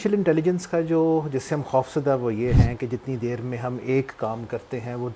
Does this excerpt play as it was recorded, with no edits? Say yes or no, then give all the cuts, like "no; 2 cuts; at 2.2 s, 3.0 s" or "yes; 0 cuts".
yes; 0 cuts